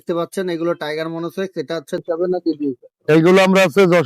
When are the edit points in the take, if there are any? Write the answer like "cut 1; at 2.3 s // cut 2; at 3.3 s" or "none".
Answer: cut 1; at 2.0 s